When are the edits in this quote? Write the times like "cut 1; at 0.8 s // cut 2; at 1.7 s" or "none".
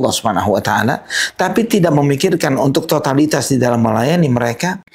none